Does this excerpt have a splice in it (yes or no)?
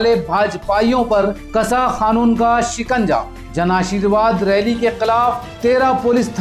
no